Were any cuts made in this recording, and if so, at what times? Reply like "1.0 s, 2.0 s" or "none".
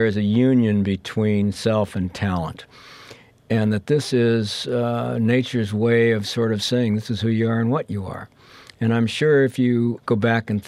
none

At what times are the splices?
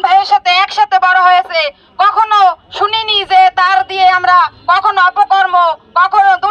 none

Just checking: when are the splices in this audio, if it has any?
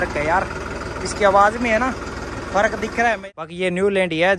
3.3 s

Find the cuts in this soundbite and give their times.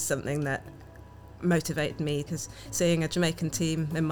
2.3 s

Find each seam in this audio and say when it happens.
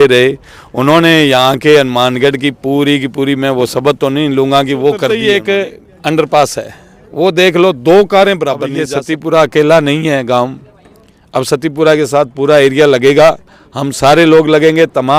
5.1 s, 8.9 s

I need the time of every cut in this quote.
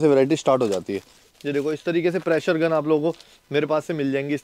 1.2 s

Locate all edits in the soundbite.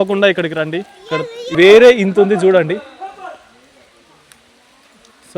1.5 s

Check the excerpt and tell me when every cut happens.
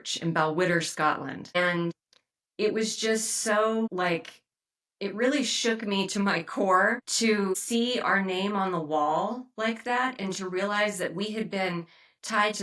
1.9 s, 3.9 s, 7.5 s

